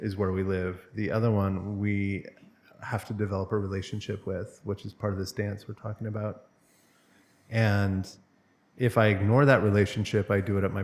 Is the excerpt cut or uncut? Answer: uncut